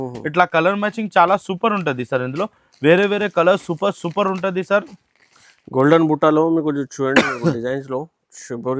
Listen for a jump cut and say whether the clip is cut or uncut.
uncut